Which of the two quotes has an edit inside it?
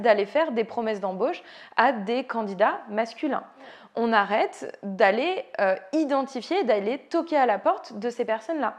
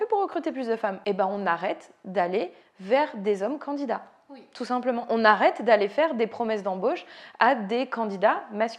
second; 1 cut; at 1.0 s

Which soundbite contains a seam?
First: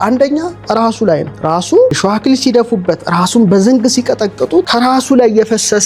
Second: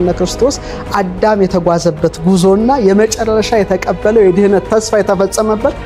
first; 3 cuts; at 1.3 s, 2.0 s, 4.7 s

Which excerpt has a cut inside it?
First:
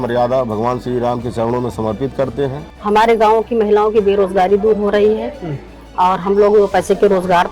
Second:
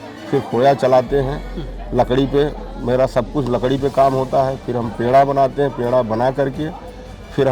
first; 1 cut; at 2.7 s

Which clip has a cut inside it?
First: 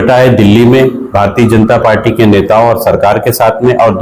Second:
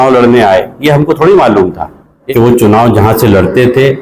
second; 1 cut; at 2.1 s

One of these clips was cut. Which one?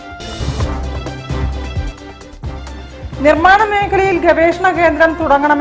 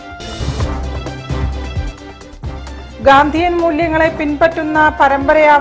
first; 1 cut; at 2.6 s

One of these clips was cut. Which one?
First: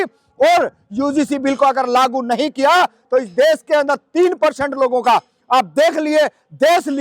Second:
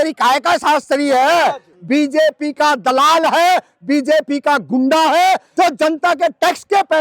second; 2 cuts; at 1.7 s, 5.5 s

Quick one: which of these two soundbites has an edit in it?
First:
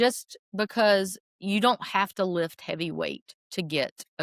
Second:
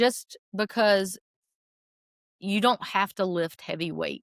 first; 1 cut; at 1.3 s

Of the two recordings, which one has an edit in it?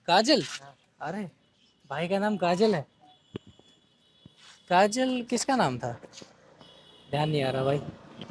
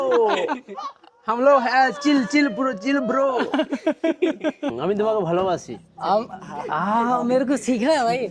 second; 1 cut; at 4.7 s

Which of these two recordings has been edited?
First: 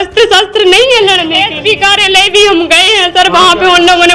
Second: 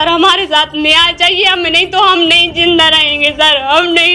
first; 1 cut; at 1.4 s

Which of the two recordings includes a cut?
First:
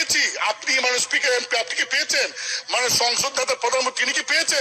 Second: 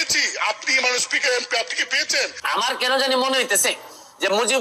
second; 1 cut; at 2.5 s

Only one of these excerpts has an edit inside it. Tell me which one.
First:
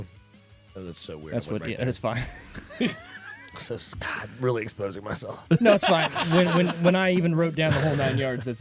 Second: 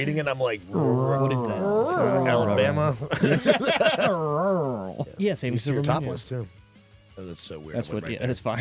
second; 1 cut; at 5.0 s

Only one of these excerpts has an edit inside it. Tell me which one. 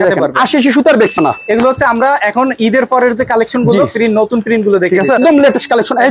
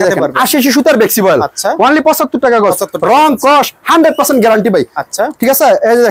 first; 2 cuts; at 1.1 s, 5.2 s

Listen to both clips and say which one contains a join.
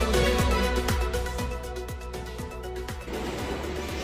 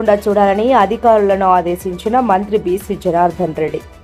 first; 1 cut; at 2.2 s

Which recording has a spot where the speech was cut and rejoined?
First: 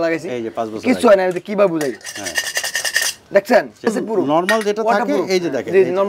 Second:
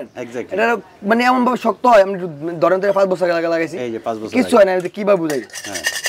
first; 1 cut; at 3.9 s

